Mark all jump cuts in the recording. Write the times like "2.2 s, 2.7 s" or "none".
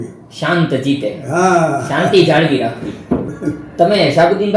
3.3 s